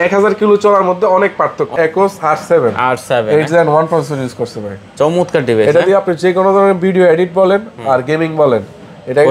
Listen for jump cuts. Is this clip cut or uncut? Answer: cut